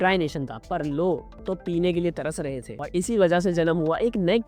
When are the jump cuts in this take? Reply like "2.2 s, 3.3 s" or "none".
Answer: none